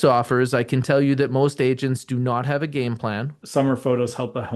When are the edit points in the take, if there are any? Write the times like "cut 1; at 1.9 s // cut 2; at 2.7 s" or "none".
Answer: cut 1; at 3.4 s

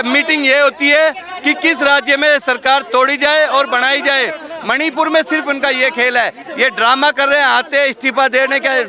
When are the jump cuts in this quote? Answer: none

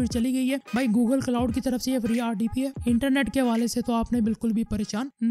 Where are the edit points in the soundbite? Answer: none

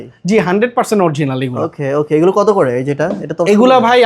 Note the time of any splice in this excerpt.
none

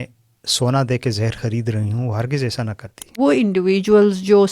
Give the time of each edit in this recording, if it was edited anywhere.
cut 1; at 3.2 s

